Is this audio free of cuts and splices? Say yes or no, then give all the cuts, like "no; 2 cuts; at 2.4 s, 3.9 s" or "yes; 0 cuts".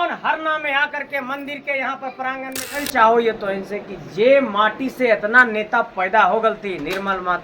no; 1 cut; at 2.8 s